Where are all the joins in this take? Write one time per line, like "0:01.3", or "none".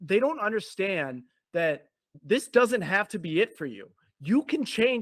0:02.2